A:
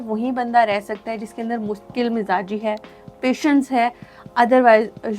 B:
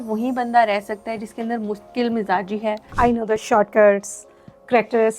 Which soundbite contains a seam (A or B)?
B